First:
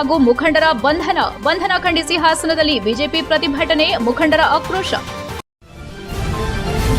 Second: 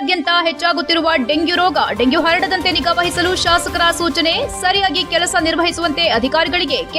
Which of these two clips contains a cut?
first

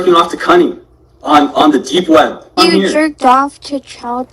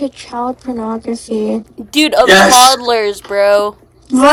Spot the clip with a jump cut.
first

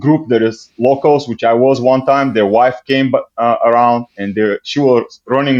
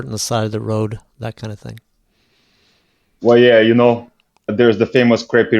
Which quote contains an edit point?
second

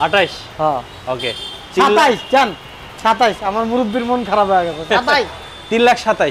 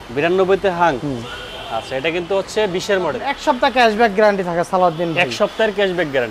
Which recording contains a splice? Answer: second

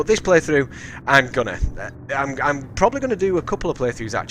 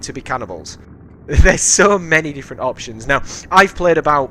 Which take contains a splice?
second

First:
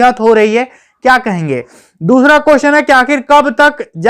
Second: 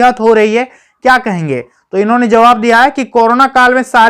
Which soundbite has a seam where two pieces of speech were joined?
first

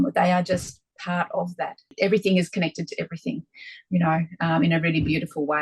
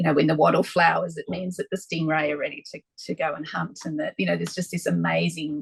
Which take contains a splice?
first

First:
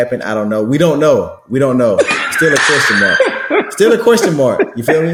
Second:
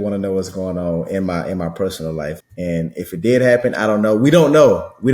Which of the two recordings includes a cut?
second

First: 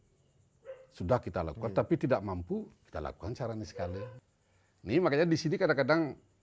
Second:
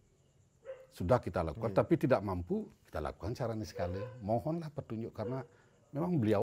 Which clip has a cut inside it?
first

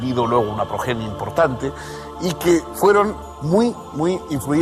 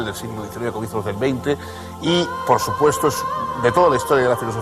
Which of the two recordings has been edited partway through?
second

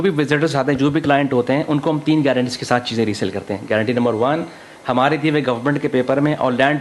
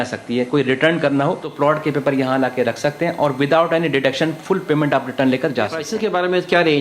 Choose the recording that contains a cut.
second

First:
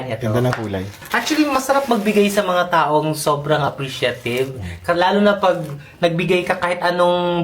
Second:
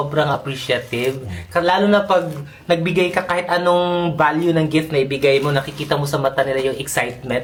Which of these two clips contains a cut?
first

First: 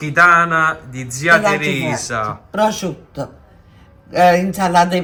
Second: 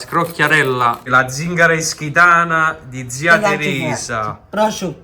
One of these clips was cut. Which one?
second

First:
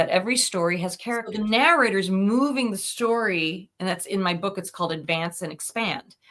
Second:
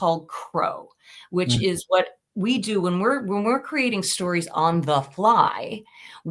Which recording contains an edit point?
first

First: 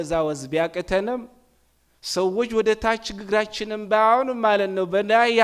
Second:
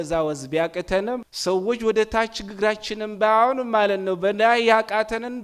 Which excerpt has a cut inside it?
second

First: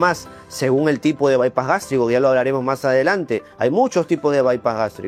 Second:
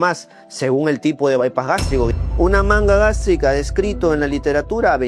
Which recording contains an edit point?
second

